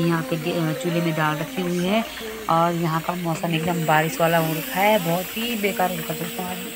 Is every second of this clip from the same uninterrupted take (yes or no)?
yes